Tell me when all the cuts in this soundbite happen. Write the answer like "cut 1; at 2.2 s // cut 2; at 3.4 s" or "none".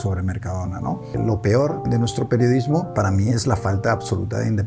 cut 1; at 1.2 s // cut 2; at 1.8 s // cut 3; at 2.9 s